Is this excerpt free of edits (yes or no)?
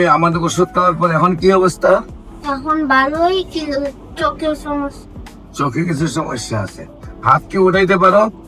yes